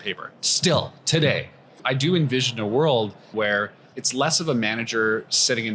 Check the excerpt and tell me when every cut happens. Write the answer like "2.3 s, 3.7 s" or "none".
1.8 s, 3.3 s